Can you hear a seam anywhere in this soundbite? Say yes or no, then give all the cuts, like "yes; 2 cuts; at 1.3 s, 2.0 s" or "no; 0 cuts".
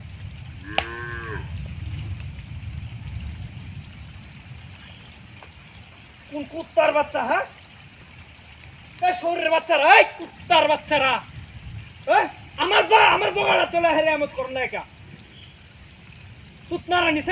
no; 0 cuts